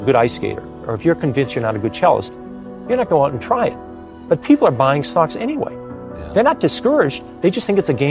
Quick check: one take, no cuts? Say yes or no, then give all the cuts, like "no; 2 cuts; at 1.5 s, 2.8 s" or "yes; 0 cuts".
yes; 0 cuts